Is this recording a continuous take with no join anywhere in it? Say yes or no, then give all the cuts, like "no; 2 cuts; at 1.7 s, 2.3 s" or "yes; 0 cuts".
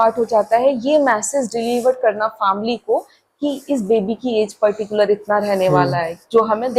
yes; 0 cuts